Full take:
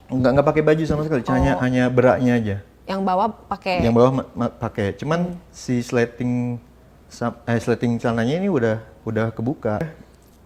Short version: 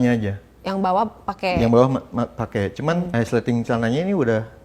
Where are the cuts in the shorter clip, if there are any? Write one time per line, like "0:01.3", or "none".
0:03.1